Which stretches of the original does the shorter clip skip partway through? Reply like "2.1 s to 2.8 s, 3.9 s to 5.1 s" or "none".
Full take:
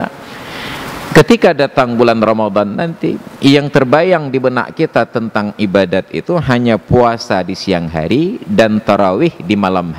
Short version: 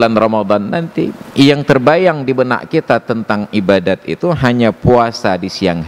none